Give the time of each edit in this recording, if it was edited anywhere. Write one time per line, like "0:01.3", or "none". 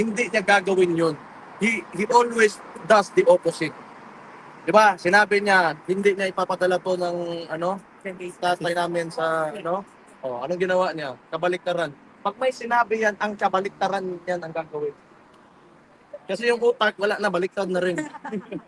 none